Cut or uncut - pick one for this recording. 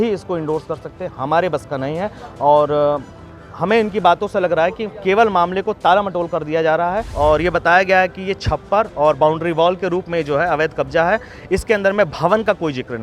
cut